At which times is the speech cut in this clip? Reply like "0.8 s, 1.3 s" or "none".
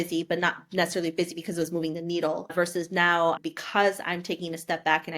2.4 s